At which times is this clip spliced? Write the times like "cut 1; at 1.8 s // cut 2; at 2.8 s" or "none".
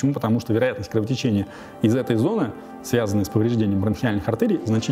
none